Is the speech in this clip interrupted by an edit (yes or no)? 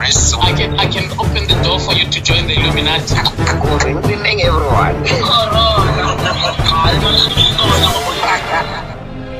no